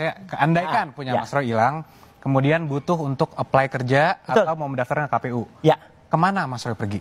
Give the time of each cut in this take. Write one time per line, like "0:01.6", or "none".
0:04.6
0:05.8